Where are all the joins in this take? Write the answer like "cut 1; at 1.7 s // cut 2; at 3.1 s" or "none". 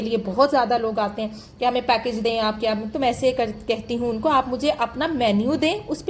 none

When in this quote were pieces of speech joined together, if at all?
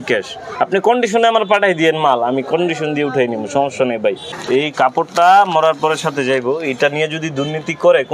cut 1; at 4.3 s

